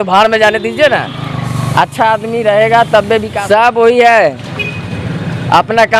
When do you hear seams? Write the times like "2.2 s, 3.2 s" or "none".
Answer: 3.3 s